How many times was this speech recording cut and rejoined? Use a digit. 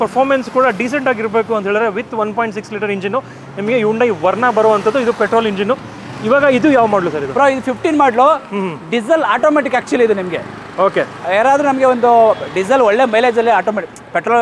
0